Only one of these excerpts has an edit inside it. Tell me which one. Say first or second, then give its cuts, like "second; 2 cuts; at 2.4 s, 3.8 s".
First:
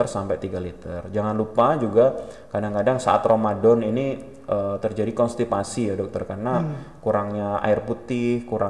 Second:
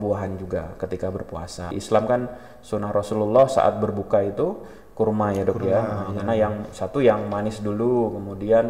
second; 1 cut; at 1.8 s